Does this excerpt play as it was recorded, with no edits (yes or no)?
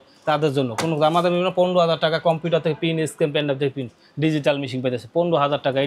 yes